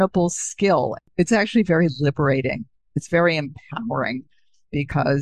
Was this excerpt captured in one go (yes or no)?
no